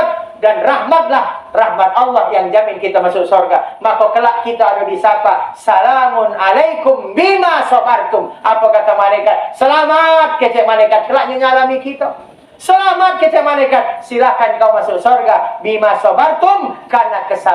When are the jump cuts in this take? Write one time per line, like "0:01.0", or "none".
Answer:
none